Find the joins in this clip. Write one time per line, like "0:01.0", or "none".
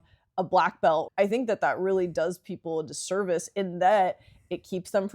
0:01.1